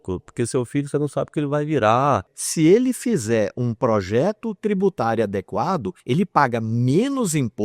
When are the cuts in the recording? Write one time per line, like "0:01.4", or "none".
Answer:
0:02.3

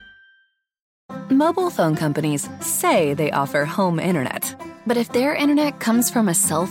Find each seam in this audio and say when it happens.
0:00.9

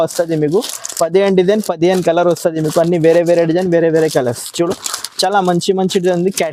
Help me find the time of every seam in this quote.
none

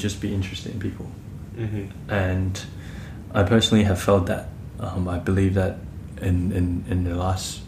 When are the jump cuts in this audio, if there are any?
none

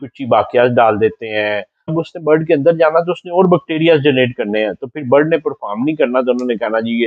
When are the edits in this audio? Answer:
0:01.9

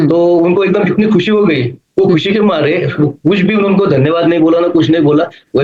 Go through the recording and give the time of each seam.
none

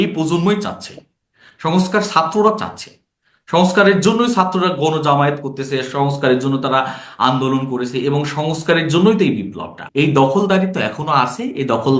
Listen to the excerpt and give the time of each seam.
0:09.8

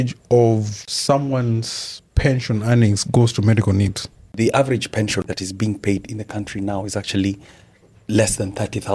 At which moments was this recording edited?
0:04.3

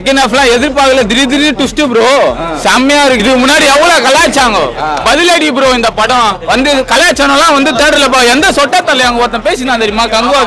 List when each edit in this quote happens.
0:03.2

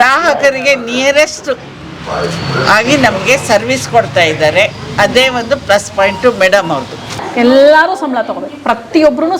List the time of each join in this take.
0:07.0

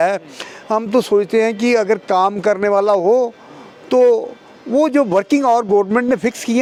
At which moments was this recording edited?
none

